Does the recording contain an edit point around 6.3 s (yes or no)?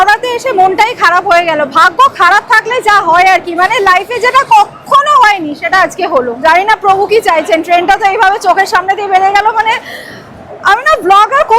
yes